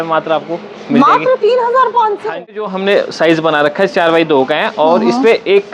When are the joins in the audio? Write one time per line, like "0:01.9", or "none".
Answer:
0:02.7